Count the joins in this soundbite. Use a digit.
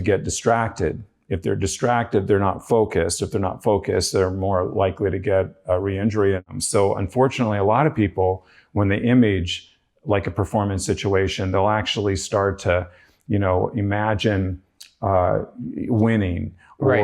1